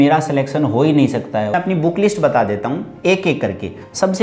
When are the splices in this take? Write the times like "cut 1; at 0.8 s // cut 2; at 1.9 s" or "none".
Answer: cut 1; at 1.5 s